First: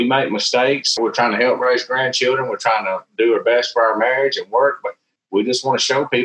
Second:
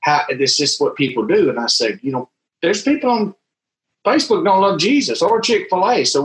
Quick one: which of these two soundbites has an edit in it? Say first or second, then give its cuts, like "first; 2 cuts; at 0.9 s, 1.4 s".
first; 1 cut; at 1.0 s